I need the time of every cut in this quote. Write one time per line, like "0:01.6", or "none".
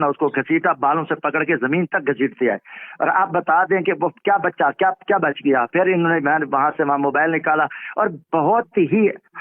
none